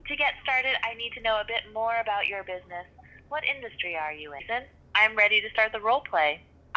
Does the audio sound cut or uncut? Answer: cut